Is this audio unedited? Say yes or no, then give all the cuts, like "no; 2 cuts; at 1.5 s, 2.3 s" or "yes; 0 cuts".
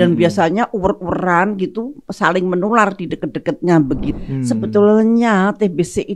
no; 1 cut; at 4.1 s